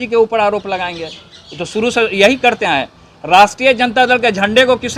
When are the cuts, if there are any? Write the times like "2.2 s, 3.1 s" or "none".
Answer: none